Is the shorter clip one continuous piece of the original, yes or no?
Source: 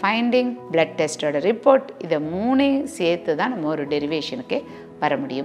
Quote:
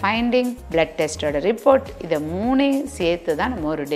yes